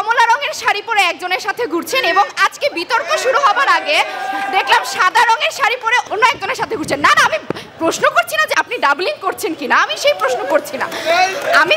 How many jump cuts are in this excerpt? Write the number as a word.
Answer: one